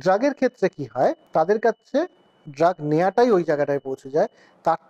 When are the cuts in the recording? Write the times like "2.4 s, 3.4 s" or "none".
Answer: 1.2 s